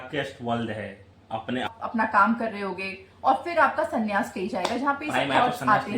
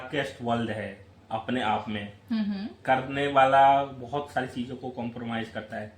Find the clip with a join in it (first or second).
first